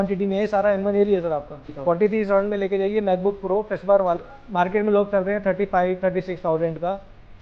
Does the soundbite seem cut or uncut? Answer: cut